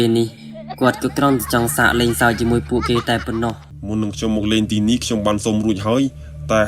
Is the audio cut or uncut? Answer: cut